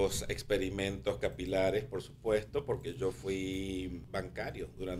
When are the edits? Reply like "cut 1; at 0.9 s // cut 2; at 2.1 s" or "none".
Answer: cut 1; at 4.0 s